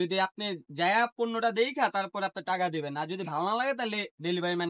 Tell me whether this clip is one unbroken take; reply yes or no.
yes